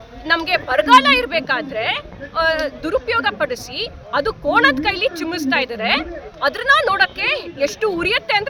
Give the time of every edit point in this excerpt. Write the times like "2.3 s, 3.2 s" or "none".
none